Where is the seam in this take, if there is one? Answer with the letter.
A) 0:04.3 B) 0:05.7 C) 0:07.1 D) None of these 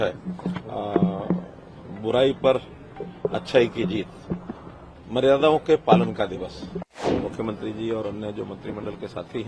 C